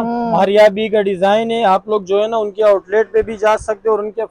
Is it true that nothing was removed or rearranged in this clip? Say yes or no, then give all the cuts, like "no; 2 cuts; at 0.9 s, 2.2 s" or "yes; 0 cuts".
yes; 0 cuts